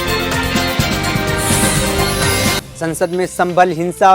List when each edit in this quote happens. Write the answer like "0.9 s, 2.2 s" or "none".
2.6 s